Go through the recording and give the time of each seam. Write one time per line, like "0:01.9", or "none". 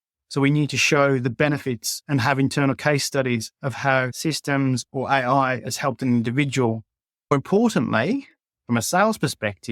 0:04.1
0:07.3